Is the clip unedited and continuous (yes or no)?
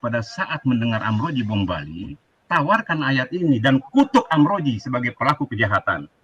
yes